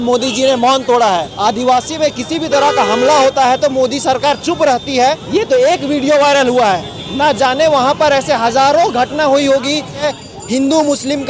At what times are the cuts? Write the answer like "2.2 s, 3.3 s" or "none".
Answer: 1.3 s, 5.2 s, 10.0 s